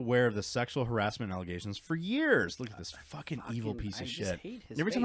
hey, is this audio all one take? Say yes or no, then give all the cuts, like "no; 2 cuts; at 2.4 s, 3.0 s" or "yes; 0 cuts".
yes; 0 cuts